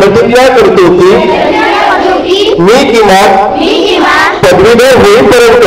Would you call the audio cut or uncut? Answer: uncut